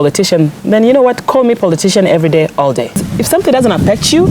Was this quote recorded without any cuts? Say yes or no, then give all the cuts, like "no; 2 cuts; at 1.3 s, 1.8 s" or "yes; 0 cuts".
no; 1 cut; at 3.0 s